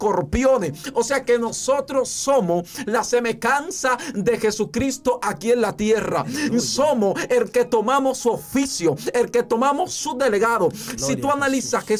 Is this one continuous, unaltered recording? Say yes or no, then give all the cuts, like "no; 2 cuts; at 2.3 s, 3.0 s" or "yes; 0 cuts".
yes; 0 cuts